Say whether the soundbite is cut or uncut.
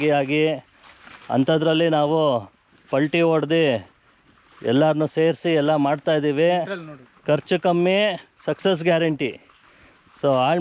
uncut